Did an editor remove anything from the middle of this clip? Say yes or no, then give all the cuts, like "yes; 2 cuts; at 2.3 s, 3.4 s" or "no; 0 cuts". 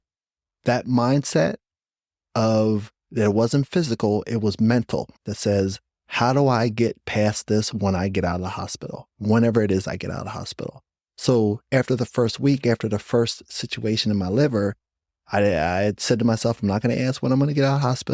yes; 1 cut; at 5.1 s